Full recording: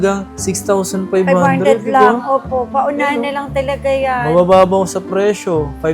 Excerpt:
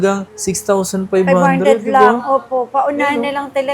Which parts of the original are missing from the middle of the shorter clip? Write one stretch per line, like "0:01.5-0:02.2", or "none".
none